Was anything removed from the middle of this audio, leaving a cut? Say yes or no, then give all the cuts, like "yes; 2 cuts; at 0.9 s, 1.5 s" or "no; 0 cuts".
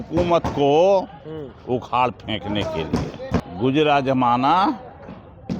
yes; 1 cut; at 3.4 s